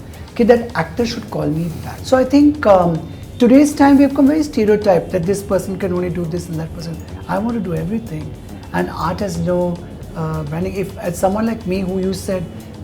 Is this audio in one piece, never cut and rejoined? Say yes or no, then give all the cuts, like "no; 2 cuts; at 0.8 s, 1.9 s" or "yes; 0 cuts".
no; 1 cut; at 1.9 s